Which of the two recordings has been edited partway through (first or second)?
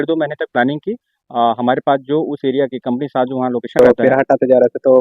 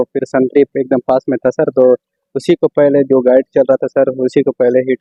first